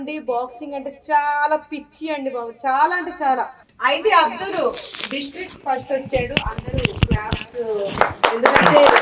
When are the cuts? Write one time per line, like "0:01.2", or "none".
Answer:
0:03.6